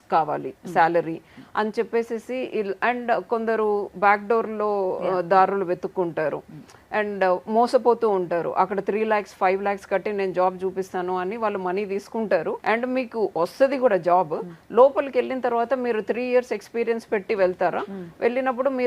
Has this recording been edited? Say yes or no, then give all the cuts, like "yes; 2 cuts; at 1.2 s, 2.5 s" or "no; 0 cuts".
no; 0 cuts